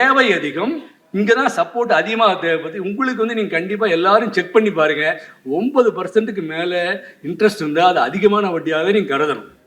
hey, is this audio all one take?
yes; 0 cuts

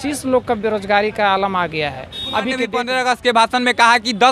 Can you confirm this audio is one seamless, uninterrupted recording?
no; 1 cut; at 2.8 s

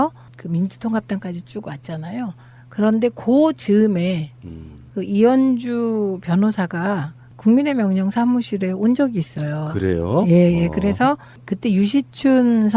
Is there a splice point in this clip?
yes; 1 cut; at 3.4 s

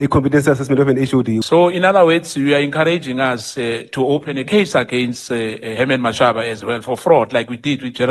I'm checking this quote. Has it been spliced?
yes; 1 cut; at 1.4 s

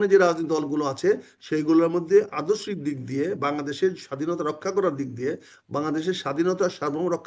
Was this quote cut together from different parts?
no; 0 cuts

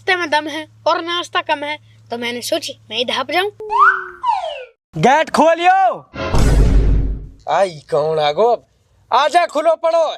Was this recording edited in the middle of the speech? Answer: yes; 1 cut; at 4.7 s

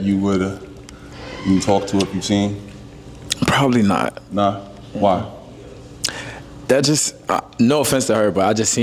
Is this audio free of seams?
yes; 0 cuts

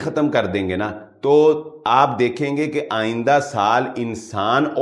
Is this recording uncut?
yes; 0 cuts

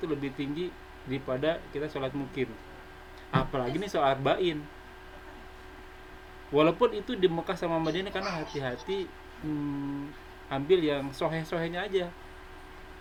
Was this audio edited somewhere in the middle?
no; 0 cuts

